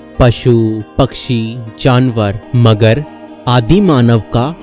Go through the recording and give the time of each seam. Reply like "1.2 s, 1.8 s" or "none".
2.4 s